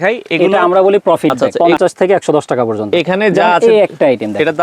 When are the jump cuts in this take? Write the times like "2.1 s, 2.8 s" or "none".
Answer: 1.5 s